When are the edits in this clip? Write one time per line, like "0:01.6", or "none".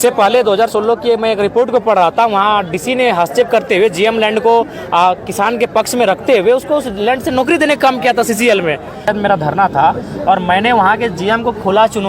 0:09.0